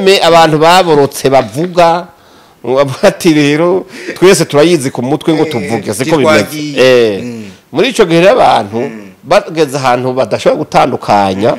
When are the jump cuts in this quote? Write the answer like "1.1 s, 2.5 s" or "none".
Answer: none